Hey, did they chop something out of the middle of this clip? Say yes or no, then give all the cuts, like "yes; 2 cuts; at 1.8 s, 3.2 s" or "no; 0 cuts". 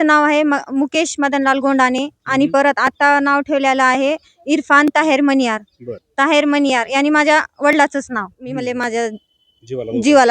yes; 1 cut; at 8.4 s